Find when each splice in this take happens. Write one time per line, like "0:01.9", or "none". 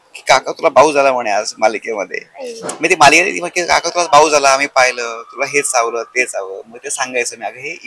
none